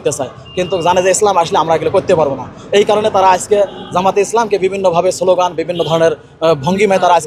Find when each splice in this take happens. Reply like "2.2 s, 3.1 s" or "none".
none